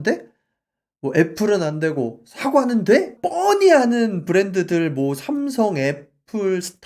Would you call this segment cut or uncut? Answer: cut